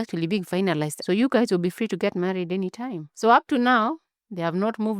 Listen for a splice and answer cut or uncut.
cut